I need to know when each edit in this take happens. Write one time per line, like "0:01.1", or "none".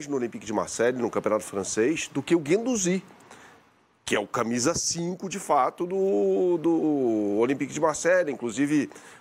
none